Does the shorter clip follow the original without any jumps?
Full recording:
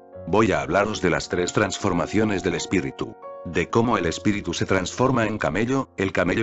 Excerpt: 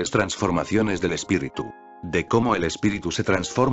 yes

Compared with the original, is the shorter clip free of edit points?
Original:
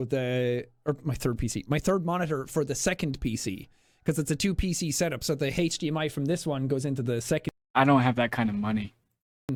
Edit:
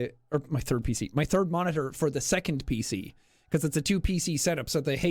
yes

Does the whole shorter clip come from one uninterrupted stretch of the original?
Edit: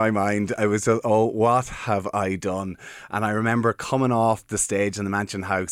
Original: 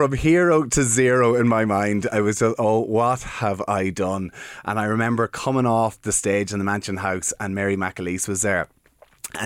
yes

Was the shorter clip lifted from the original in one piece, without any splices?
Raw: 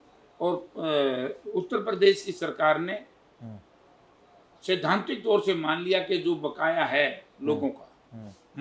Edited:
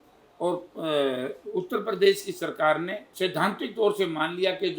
no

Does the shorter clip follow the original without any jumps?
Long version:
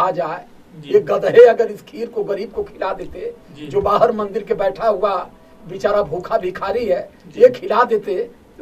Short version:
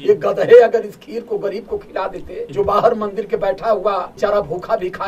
no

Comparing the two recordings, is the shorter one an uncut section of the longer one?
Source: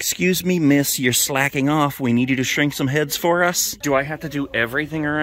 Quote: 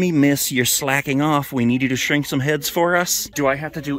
yes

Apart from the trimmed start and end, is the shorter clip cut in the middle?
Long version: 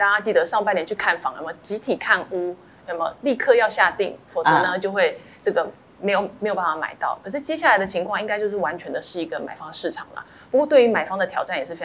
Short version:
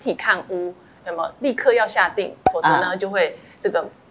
no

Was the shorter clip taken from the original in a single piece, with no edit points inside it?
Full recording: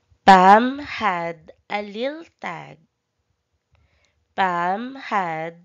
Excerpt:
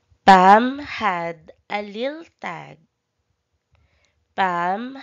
yes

